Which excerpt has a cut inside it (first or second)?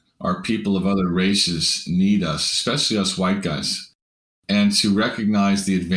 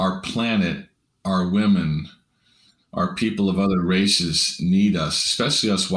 first